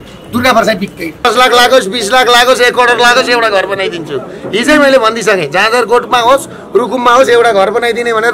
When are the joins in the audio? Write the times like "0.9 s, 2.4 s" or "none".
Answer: 1.0 s